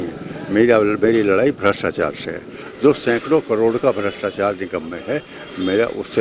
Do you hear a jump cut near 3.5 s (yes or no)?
no